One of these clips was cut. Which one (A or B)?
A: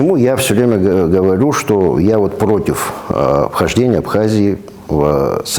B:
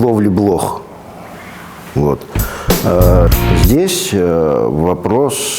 B